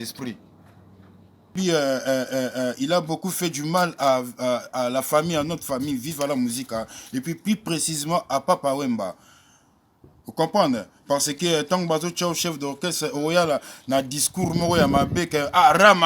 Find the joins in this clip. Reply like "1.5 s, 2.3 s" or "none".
1.5 s